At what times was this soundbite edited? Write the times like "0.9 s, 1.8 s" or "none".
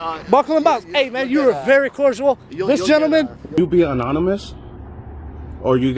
3.6 s